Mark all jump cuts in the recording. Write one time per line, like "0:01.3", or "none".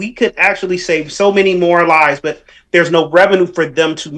none